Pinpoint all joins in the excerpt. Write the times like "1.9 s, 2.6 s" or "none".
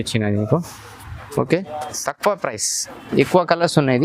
2.0 s

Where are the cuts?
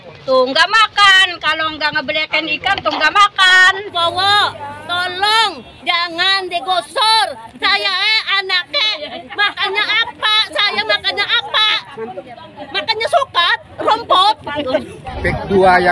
3.9 s, 15.0 s

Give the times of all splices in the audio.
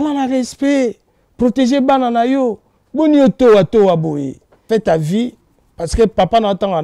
4.5 s

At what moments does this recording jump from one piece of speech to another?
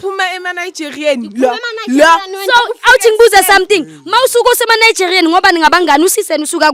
none

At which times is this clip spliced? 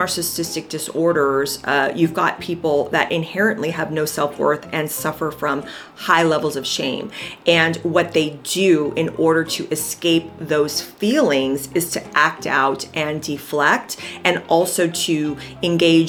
none

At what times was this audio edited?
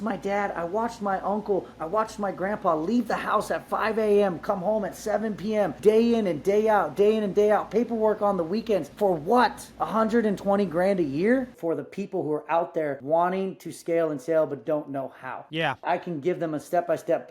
5.7 s, 8.9 s, 9.7 s, 11.5 s, 13.0 s, 15.8 s

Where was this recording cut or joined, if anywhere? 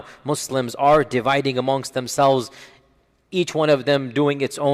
none

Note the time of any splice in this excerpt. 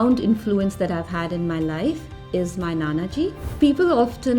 3.4 s

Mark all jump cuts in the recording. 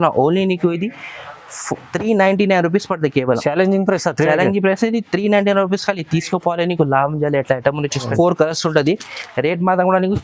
8.1 s

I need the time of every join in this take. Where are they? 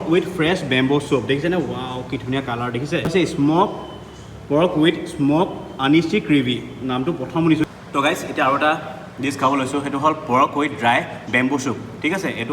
3.1 s, 7.7 s

